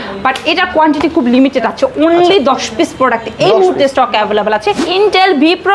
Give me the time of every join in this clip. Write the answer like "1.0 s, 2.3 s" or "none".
4.8 s